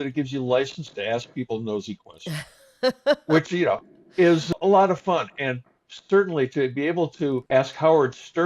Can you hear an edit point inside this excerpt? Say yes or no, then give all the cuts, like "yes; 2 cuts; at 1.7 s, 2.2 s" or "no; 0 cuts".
yes; 1 cut; at 4.5 s